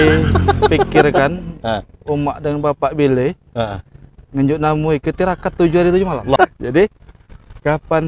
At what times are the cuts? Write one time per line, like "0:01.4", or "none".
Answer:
0:06.4